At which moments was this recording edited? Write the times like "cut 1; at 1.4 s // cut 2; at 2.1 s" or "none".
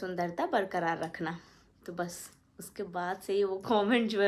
none